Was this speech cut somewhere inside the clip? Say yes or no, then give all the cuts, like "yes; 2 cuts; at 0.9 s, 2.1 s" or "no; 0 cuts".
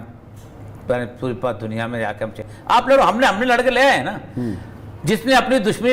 no; 0 cuts